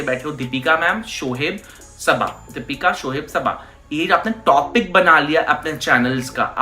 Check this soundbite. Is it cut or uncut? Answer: uncut